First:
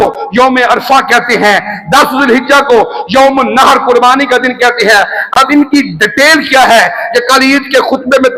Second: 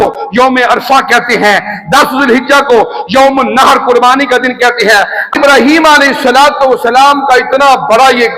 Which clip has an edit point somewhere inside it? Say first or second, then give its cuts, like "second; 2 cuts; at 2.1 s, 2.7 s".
second; 1 cut; at 5.3 s